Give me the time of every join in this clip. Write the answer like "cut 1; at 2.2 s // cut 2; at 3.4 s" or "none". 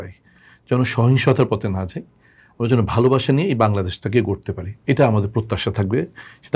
none

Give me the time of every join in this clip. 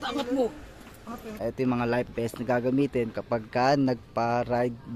cut 1; at 1.3 s

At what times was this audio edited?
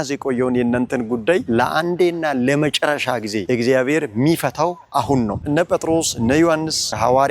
cut 1; at 5.4 s

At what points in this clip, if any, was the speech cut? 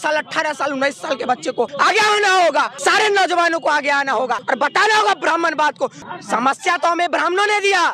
cut 1; at 1.7 s // cut 2; at 2.7 s // cut 3; at 4.4 s // cut 4; at 6.0 s

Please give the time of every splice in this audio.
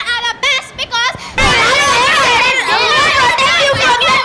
cut 1; at 1.3 s

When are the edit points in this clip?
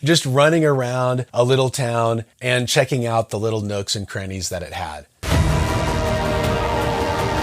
cut 1; at 5.1 s

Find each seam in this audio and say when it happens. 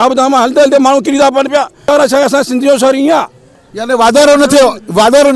cut 1; at 1.9 s

